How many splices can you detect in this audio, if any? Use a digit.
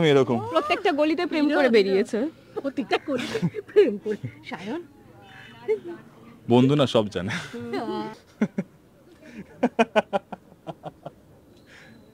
1